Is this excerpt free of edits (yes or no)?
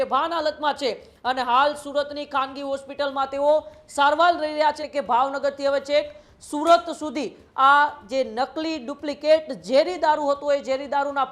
no